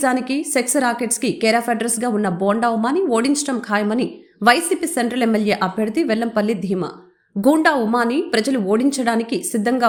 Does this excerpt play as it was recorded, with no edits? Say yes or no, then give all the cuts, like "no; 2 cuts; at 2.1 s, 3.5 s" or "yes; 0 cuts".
yes; 0 cuts